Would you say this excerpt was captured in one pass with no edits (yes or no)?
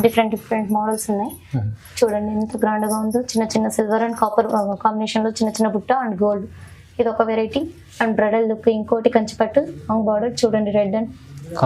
yes